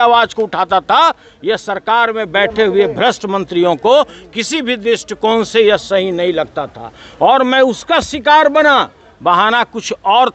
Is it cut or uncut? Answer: uncut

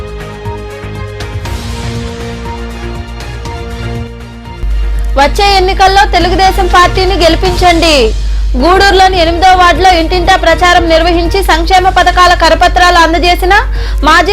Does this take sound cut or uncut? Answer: cut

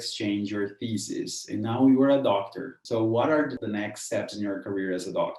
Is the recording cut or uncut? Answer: cut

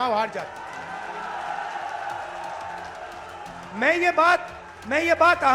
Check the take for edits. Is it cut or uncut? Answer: uncut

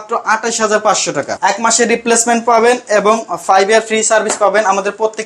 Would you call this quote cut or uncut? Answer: cut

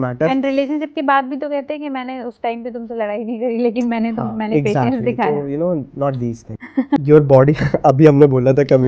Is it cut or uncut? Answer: cut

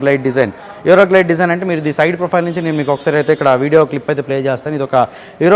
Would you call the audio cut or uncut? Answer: uncut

